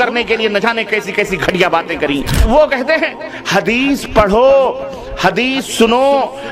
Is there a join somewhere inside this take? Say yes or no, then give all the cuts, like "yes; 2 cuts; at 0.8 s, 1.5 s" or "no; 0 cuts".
yes; 1 cut; at 2.4 s